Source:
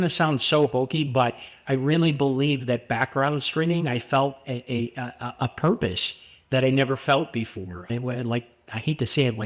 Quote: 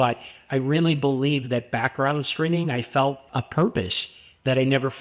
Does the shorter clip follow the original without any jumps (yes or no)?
no